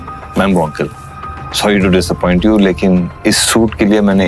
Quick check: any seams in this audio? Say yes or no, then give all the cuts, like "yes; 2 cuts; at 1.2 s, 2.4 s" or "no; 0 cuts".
no; 0 cuts